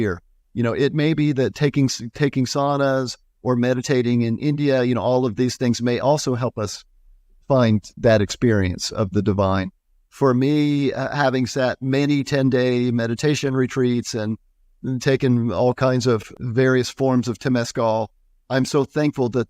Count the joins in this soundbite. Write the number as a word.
one